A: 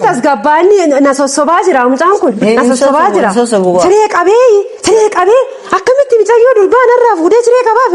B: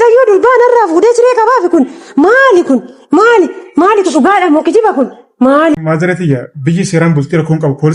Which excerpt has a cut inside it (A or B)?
B